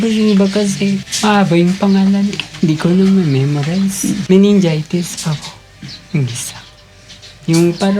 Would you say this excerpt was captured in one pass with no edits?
no; 2 cuts; at 1.1 s, 4.2 s

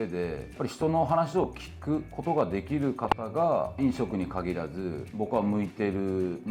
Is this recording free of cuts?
yes; 0 cuts

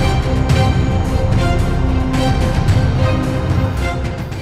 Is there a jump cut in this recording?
no; 0 cuts

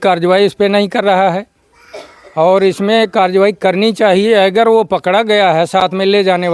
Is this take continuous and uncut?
yes; 0 cuts

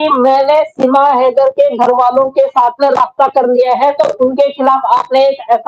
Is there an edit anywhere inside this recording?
no; 0 cuts

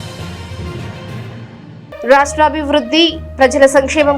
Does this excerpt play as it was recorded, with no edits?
no; 1 cut; at 2.0 s

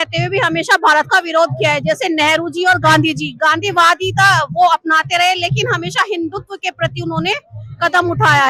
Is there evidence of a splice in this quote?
no; 0 cuts

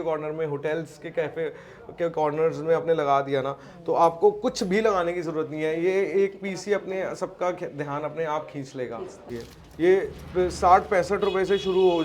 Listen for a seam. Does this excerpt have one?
yes; 1 cut; at 9.3 s

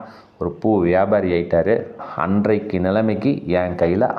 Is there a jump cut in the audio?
yes; 1 cut; at 2.1 s

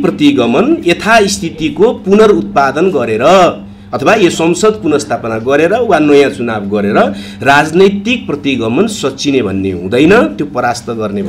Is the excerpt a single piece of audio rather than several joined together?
yes; 0 cuts

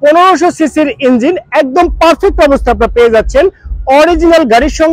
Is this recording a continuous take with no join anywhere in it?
yes; 0 cuts

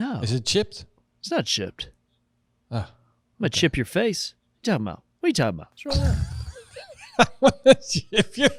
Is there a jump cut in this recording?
yes; 1 cut; at 5.7 s

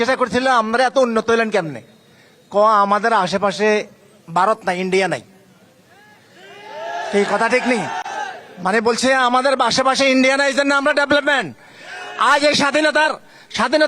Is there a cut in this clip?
no; 0 cuts

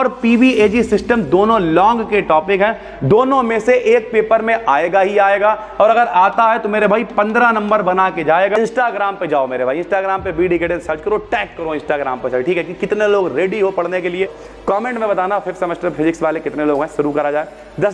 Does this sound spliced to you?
yes; 2 cuts; at 8.6 s, 14.4 s

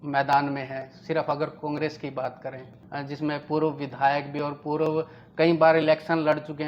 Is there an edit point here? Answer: yes; 1 cut; at 2.8 s

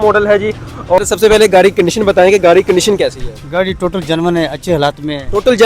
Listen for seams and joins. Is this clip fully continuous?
no; 1 cut; at 1.0 s

